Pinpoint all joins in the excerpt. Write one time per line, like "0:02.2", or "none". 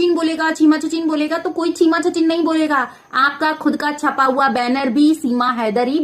none